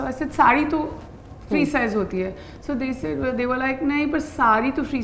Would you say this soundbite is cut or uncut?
uncut